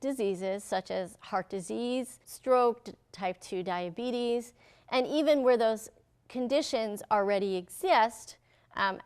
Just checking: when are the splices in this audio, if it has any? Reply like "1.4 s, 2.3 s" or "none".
2.2 s